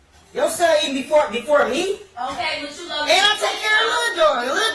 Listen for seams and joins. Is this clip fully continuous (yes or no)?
yes